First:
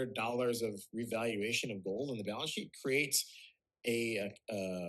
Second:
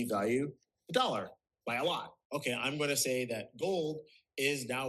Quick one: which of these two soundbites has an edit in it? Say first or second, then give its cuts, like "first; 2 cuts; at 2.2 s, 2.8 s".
second; 1 cut; at 2.2 s